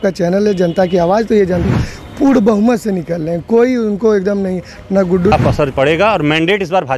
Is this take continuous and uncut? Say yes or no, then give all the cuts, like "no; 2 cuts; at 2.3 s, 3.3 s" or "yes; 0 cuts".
no; 2 cuts; at 1.7 s, 5.3 s